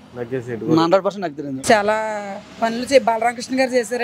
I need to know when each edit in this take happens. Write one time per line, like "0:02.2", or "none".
0:01.6